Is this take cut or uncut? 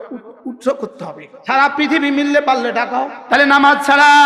cut